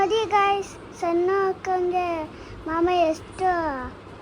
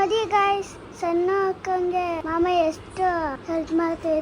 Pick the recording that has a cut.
second; 2 cuts; at 2.2 s, 3.4 s

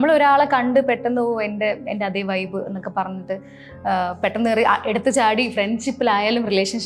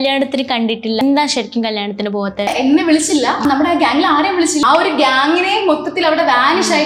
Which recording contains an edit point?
second; 4 cuts; at 1.0 s, 2.5 s, 3.4 s, 4.6 s

